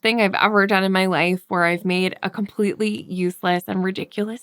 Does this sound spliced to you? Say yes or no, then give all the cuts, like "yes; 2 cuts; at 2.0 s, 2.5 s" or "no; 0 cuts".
no; 0 cuts